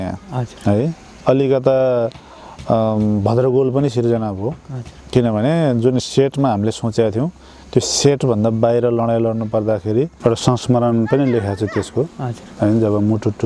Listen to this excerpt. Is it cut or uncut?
cut